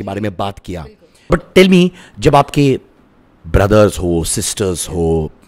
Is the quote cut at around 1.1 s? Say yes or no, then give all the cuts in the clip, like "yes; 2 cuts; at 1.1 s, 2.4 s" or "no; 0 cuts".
yes; 1 cut; at 1.1 s